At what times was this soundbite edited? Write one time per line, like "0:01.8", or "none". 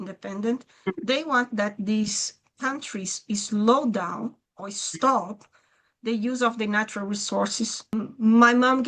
0:07.9